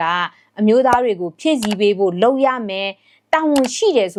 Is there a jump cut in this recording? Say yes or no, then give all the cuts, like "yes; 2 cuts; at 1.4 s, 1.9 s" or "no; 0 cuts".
no; 0 cuts